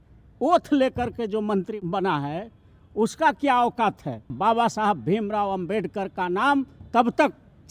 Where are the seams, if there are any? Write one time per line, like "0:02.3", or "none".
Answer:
0:01.7
0:04.3